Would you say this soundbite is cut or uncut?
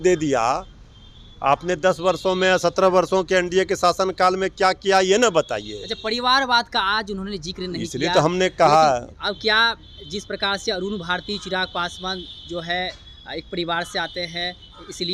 uncut